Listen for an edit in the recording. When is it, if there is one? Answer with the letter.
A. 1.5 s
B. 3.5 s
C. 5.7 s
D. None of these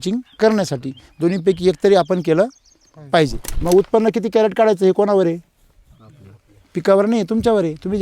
B